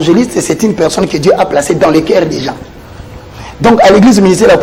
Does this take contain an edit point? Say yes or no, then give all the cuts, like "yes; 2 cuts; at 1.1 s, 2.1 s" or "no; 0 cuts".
no; 0 cuts